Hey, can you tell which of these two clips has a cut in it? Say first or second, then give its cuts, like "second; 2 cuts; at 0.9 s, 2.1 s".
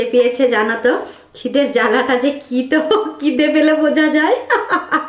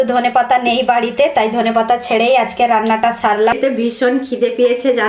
second; 1 cut; at 3.5 s